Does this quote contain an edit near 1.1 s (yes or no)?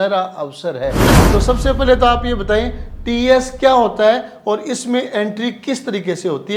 yes